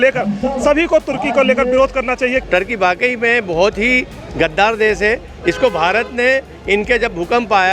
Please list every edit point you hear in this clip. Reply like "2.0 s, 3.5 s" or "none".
2.4 s